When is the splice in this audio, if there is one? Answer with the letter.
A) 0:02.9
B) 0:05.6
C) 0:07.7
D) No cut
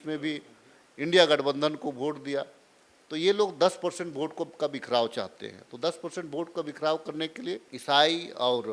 C